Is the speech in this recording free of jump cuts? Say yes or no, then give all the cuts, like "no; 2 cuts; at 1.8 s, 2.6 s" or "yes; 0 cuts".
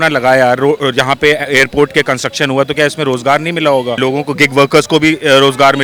yes; 0 cuts